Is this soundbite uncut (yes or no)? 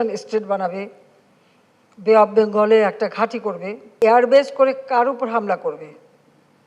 no